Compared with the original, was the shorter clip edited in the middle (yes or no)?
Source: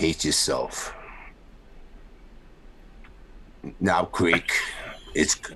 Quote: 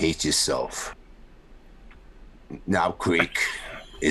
yes